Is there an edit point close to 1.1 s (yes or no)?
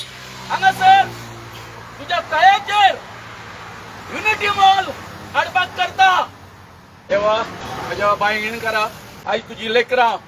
no